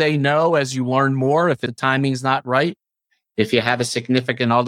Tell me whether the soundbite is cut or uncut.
cut